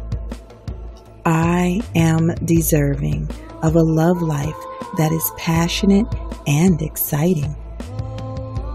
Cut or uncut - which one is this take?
cut